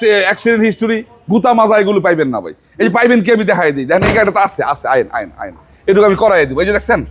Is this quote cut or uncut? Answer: uncut